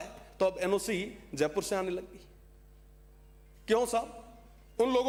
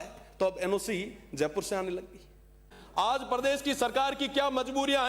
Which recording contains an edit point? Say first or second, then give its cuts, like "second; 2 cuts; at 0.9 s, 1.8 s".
second; 1 cut; at 2.7 s